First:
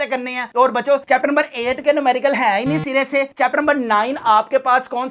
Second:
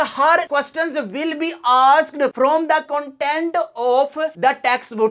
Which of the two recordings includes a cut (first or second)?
second